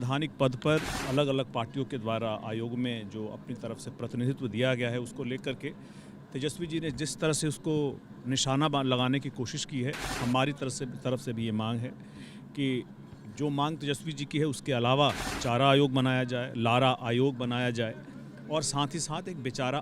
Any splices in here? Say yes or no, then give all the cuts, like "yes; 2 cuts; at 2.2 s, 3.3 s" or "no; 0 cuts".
yes; 3 cuts; at 1.0 s, 10.1 s, 15.3 s